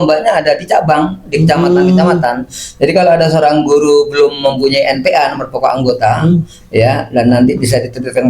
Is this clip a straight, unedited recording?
yes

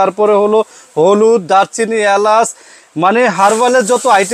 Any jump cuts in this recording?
no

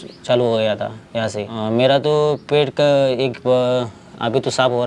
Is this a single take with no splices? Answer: no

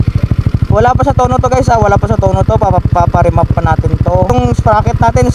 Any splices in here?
yes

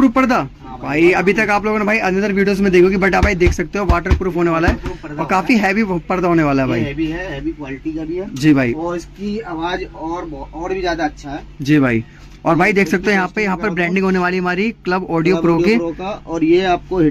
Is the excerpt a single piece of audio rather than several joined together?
yes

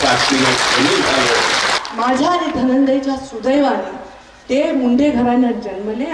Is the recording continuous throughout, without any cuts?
no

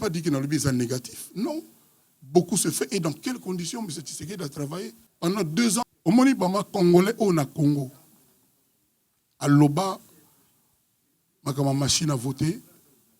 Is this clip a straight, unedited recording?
no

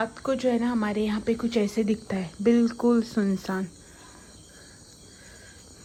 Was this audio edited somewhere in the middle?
no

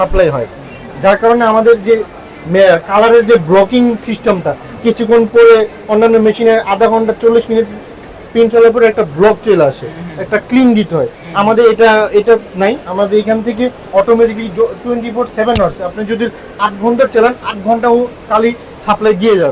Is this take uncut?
yes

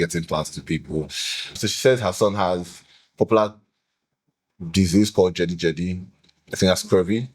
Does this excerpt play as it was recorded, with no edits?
no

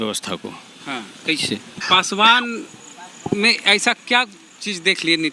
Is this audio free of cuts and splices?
no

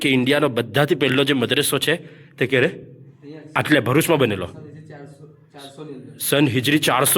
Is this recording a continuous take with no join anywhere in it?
yes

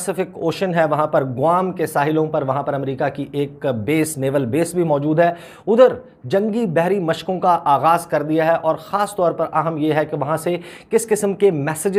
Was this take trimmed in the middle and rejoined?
no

